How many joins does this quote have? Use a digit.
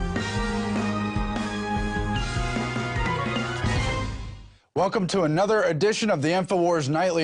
1